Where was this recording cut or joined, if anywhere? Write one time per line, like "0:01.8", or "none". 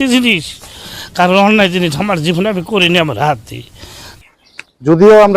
0:04.1